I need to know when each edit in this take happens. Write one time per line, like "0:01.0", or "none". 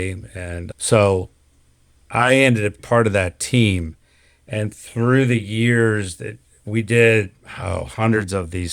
0:02.8